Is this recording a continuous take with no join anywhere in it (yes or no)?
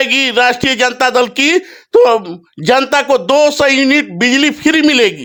yes